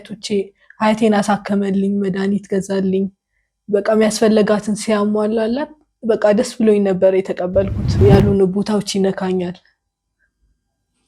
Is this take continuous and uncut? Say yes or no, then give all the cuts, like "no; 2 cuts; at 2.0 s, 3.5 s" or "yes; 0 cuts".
no; 1 cut; at 8.0 s